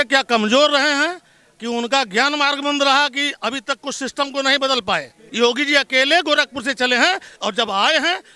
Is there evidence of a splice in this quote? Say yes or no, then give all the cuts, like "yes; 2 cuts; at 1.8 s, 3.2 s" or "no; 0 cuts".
yes; 1 cut; at 5.2 s